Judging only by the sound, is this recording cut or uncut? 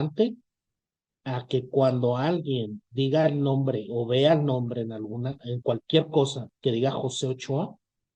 uncut